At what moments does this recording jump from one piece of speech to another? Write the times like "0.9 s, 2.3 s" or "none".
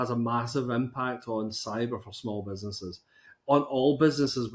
none

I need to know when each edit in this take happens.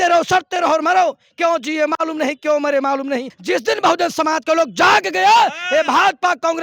3.3 s

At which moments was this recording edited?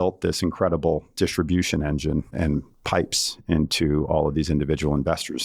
none

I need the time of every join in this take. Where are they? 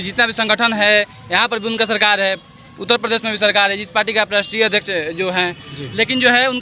none

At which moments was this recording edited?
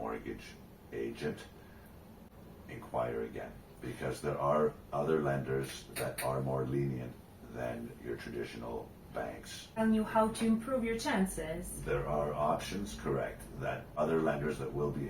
2.3 s, 9.8 s, 14.0 s

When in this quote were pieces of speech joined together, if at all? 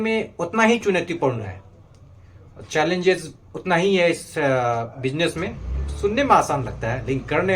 none

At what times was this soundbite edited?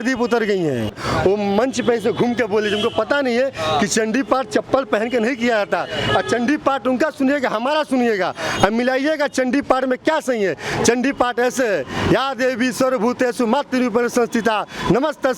0.9 s

